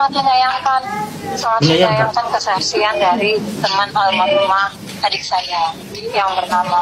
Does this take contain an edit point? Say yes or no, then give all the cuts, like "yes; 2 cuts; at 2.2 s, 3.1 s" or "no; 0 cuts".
no; 0 cuts